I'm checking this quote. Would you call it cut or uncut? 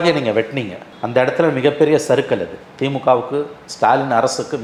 uncut